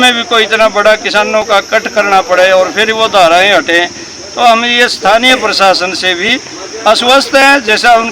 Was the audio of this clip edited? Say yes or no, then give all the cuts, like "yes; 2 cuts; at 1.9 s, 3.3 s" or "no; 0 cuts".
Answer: no; 0 cuts